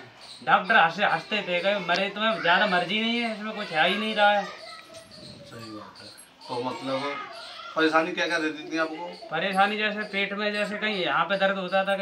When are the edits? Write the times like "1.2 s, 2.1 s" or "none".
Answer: none